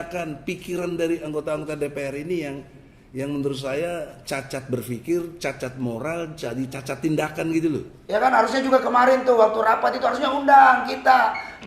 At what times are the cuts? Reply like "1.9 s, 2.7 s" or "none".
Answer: 7.9 s